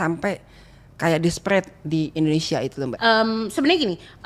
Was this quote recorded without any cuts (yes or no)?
no